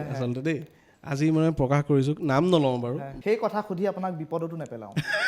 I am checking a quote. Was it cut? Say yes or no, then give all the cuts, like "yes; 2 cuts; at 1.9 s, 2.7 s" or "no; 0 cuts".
yes; 1 cut; at 3.1 s